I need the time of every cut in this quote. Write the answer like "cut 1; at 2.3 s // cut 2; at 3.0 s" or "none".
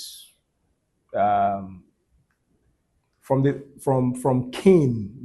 none